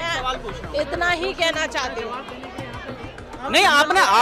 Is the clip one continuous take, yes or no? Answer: yes